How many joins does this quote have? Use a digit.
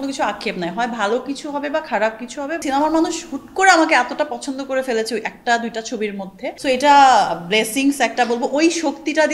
2